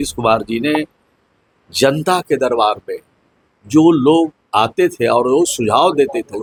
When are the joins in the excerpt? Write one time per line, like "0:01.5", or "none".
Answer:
none